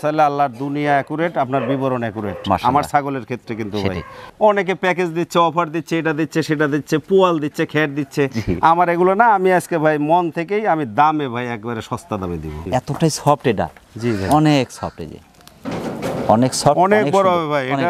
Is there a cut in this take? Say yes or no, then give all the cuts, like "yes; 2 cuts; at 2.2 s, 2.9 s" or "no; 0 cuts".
yes; 2 cuts; at 4.2 s, 12.7 s